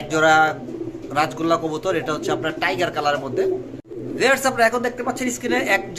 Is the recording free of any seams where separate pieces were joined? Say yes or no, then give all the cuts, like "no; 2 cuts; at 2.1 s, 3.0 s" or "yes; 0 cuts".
no; 1 cut; at 4.3 s